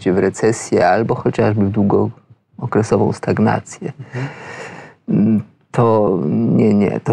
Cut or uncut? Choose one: uncut